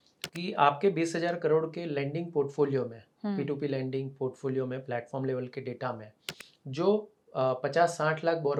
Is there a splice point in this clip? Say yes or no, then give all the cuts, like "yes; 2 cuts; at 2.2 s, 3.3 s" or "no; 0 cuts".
no; 0 cuts